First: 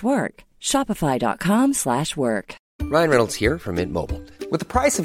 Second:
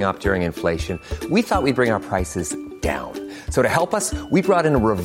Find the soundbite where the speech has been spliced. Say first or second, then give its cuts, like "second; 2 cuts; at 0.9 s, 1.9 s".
first; 1 cut; at 2.7 s